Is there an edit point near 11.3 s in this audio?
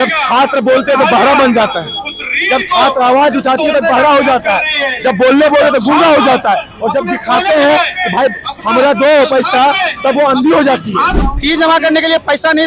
yes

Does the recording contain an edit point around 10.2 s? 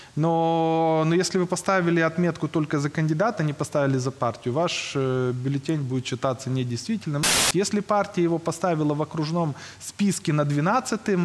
no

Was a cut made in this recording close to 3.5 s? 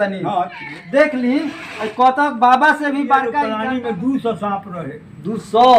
yes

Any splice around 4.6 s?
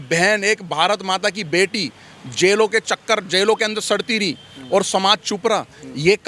no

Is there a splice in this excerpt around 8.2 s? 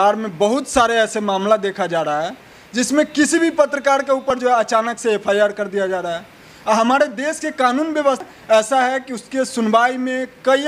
yes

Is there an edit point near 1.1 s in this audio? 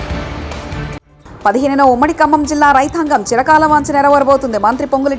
yes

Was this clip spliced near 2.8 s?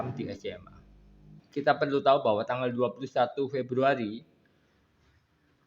no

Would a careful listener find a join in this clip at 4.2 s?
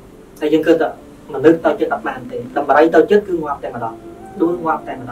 no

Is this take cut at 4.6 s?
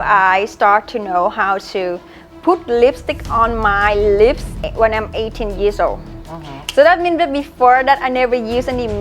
yes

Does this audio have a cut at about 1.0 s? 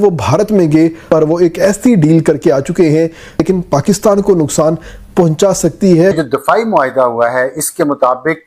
yes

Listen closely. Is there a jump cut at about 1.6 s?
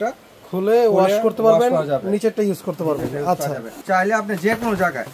no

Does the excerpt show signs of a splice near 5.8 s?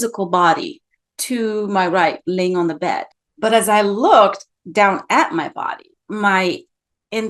no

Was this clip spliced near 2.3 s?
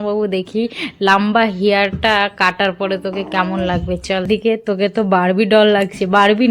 no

